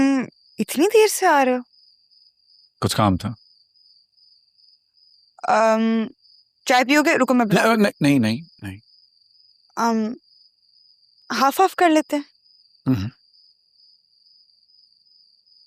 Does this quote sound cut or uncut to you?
uncut